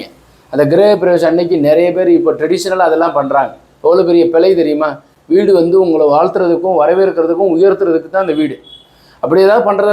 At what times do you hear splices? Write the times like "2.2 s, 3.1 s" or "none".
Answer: none